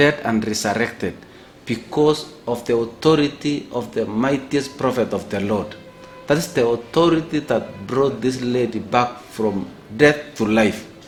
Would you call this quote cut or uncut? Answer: uncut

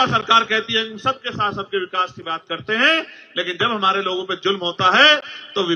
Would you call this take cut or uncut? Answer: uncut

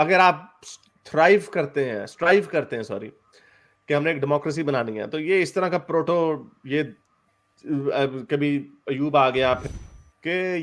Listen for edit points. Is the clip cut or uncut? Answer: cut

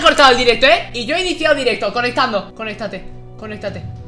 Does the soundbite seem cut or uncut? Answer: uncut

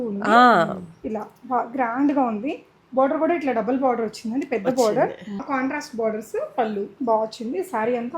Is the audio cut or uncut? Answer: cut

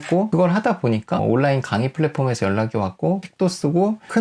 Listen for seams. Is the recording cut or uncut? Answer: cut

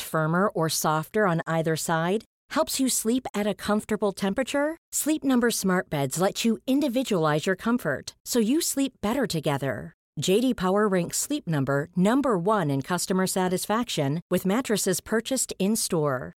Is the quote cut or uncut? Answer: uncut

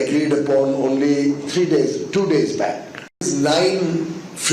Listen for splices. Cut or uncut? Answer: cut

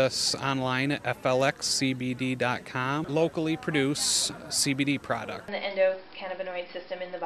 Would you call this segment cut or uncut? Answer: cut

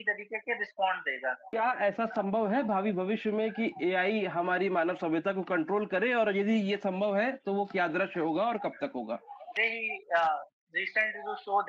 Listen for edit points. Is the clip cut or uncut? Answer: cut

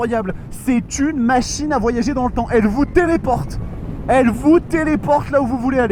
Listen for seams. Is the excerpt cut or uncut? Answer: uncut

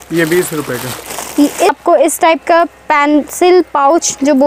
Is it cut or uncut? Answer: cut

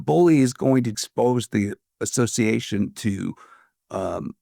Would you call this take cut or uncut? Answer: cut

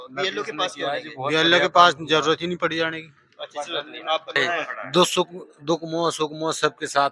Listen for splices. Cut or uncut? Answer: cut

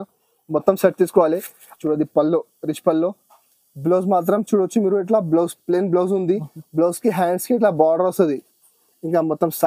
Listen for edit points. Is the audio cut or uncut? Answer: cut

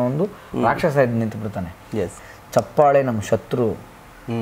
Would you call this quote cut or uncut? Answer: cut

